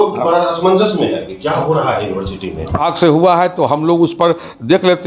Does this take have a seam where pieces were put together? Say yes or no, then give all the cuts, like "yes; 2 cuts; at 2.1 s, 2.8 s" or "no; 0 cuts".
yes; 1 cut; at 2.8 s